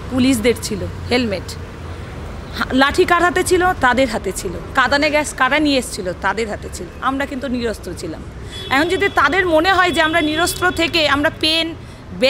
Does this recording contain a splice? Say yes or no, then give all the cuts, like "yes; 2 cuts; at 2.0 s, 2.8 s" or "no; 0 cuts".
no; 0 cuts